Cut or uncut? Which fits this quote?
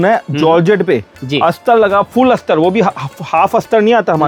uncut